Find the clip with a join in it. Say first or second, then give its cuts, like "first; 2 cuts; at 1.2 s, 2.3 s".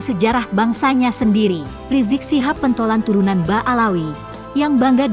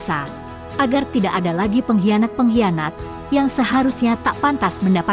first; 1 cut; at 1.7 s